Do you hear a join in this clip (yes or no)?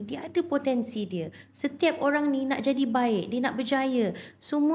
no